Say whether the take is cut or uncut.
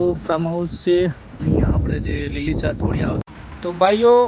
cut